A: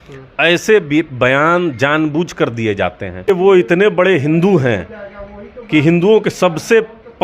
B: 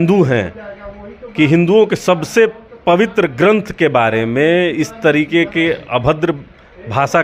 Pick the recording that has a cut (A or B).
A